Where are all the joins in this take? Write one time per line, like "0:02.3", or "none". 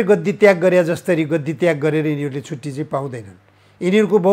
none